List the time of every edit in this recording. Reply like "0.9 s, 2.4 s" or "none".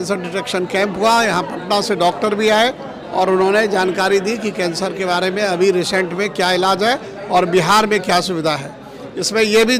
none